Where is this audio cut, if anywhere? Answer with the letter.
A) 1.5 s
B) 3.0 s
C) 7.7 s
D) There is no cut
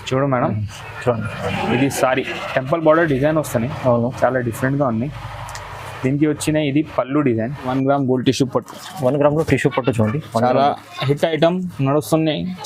C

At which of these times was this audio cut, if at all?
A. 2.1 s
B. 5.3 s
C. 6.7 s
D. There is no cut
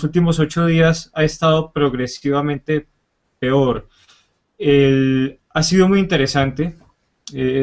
B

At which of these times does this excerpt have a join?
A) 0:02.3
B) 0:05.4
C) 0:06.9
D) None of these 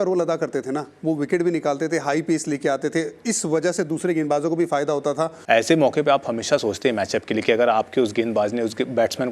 B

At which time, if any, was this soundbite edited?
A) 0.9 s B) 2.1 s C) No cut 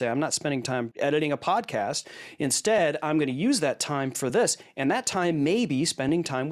A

